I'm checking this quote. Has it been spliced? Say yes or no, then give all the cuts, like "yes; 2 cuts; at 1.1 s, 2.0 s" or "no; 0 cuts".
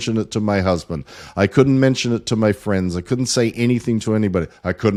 no; 0 cuts